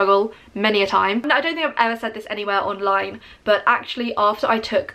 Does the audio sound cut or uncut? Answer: cut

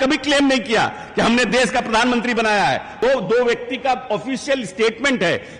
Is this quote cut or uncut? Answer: cut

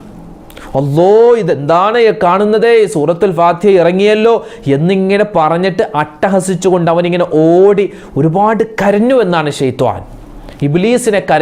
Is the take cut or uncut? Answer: uncut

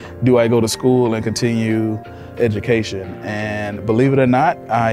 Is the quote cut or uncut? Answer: cut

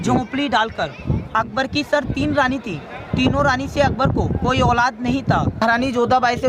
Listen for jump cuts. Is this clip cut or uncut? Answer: cut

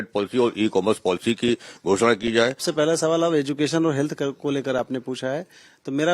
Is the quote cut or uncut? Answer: cut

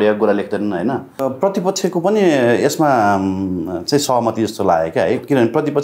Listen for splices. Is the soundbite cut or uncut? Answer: cut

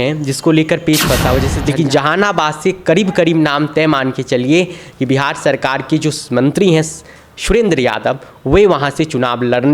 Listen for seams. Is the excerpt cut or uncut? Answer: cut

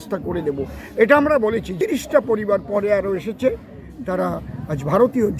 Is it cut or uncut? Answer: cut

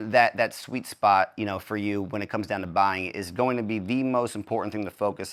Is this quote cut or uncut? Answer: uncut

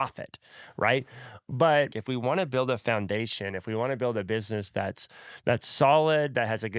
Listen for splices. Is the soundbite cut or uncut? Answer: cut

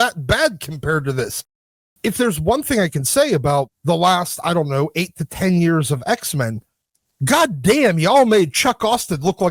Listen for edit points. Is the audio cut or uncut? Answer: uncut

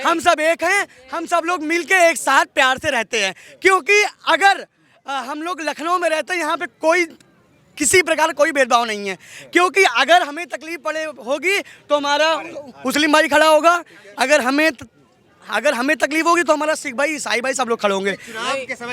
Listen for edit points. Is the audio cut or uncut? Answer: uncut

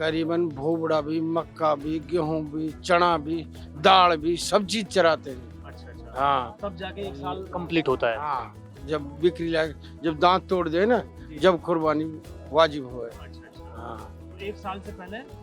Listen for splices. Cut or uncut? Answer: uncut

